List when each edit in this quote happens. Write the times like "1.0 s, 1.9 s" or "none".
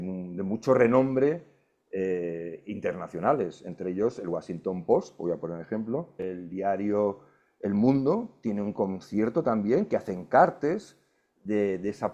6.3 s